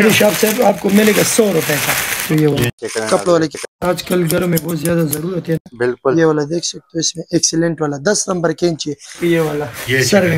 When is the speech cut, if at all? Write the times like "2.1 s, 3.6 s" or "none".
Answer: 2.2 s, 9.2 s